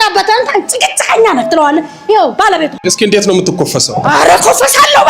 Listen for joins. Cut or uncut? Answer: cut